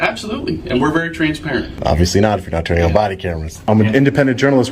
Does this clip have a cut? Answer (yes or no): yes